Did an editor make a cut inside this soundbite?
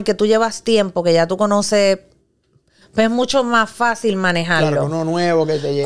no; 0 cuts

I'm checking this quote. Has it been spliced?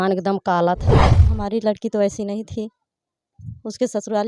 yes; 1 cut; at 1.2 s

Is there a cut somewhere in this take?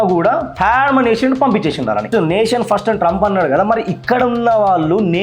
yes; 1 cut; at 2.1 s

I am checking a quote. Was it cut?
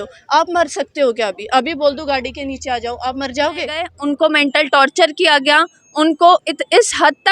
yes; 1 cut; at 3.9 s

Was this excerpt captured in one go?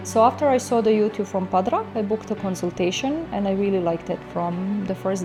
yes; 0 cuts

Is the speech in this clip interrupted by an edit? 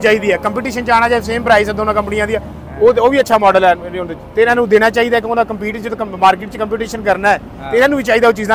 no; 0 cuts

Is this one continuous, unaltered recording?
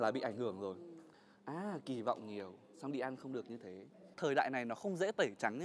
no; 2 cuts; at 1.1 s, 4.1 s

